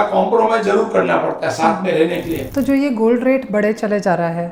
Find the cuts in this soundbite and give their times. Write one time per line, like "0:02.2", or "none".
0:02.4